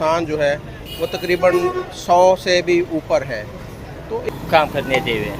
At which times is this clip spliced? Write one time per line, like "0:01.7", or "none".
0:04.3

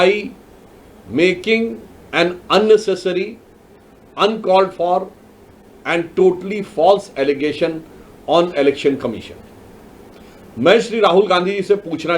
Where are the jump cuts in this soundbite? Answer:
none

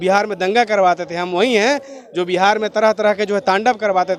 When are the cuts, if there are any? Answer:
none

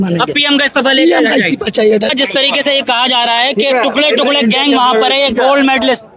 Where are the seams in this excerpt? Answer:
0:02.1

